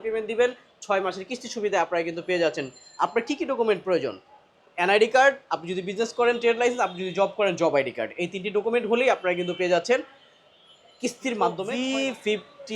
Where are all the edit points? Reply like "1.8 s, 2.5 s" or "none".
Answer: 11.7 s

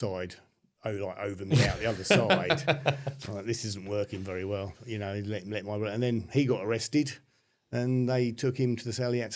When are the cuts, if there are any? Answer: none

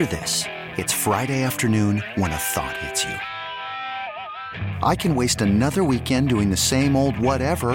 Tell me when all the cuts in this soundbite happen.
none

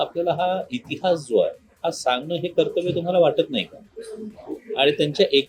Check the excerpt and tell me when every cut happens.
none

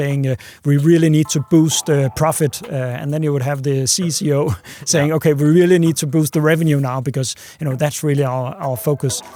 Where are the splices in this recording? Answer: none

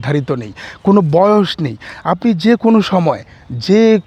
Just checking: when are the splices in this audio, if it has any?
none

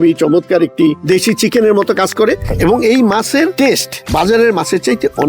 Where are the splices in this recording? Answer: 1.0 s, 2.5 s, 3.7 s

